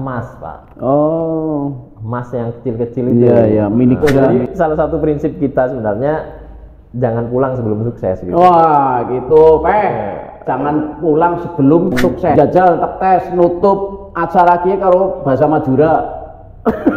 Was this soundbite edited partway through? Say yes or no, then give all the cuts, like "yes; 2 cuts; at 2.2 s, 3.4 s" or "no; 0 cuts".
yes; 2 cuts; at 4.1 s, 12.3 s